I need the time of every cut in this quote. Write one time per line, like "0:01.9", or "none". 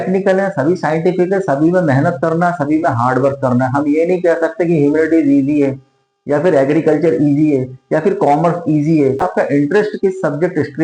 0:09.3